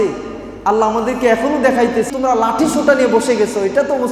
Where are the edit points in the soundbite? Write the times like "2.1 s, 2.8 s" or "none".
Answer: 2.1 s